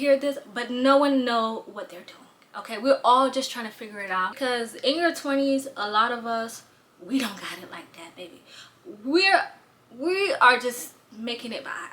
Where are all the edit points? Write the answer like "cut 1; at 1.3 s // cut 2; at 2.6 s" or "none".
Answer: cut 1; at 4.3 s